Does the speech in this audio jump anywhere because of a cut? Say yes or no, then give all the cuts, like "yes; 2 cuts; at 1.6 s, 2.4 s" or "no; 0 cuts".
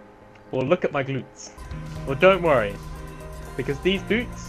yes; 1 cut; at 1.8 s